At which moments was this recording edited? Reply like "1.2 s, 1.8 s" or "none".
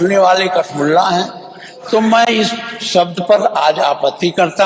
none